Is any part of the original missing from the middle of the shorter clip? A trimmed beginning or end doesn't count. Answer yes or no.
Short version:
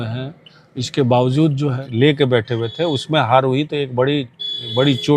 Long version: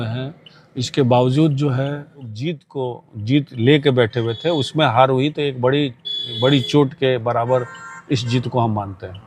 yes